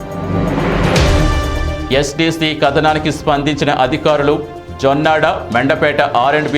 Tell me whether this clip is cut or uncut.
cut